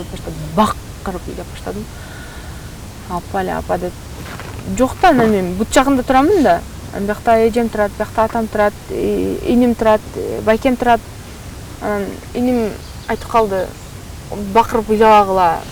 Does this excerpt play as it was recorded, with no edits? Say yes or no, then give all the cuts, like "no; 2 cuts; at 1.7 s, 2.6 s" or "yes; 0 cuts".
yes; 0 cuts